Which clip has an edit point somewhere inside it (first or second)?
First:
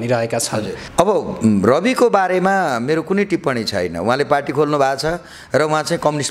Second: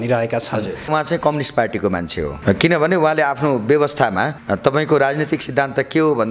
second